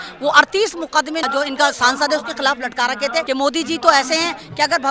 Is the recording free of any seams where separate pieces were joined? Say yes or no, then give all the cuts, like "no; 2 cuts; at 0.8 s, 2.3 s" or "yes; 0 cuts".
no; 2 cuts; at 1.2 s, 3.2 s